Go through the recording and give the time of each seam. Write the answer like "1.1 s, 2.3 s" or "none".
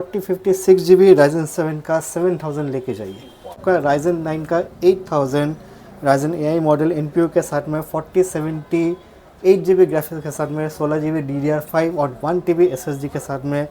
3.6 s